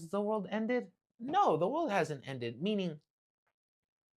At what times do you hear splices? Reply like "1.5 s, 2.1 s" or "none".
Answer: none

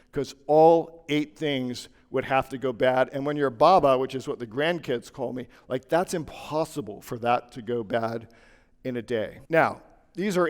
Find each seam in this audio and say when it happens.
9.4 s

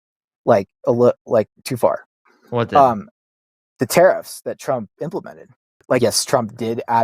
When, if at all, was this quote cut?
6.0 s

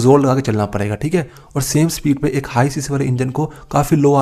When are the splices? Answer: none

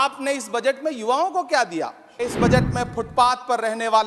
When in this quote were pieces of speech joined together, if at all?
2.3 s

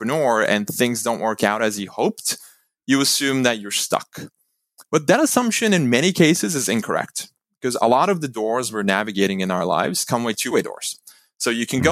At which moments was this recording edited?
10.5 s

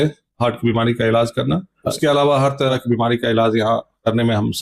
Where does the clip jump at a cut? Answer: 2.0 s, 2.7 s

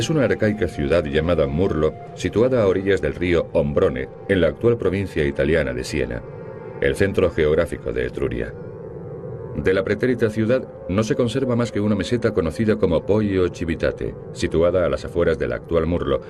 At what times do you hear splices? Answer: none

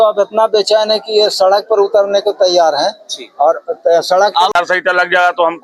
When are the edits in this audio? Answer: 4.5 s

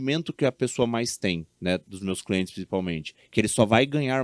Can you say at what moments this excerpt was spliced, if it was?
none

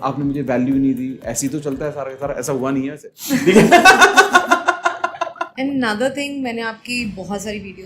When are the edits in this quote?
5.4 s

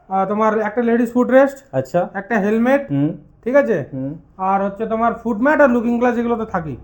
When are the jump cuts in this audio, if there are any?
none

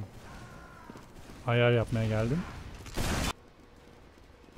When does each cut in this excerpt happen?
3.3 s

